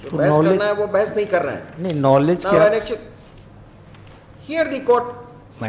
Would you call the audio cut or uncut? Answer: uncut